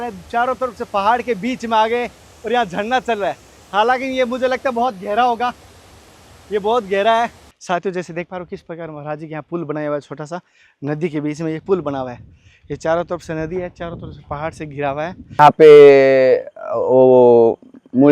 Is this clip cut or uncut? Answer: cut